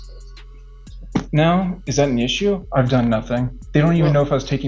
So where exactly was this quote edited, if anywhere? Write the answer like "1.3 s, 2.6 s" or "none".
2.6 s, 3.6 s